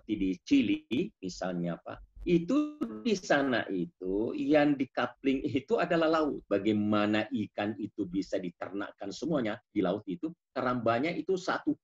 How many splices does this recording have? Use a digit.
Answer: 1